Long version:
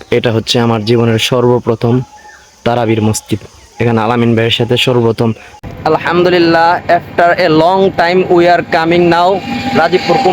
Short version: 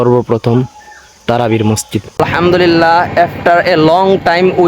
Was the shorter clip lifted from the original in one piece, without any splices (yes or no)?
no